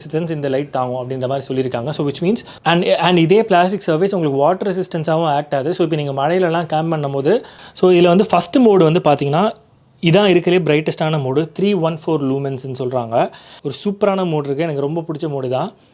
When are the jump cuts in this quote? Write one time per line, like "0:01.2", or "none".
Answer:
0:02.5
0:07.6
0:13.6